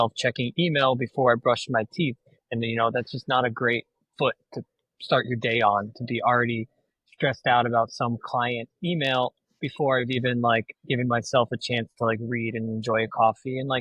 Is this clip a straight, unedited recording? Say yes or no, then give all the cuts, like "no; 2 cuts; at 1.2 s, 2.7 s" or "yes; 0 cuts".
yes; 0 cuts